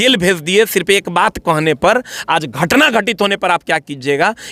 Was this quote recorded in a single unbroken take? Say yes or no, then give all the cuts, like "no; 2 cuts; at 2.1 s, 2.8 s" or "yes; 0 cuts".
yes; 0 cuts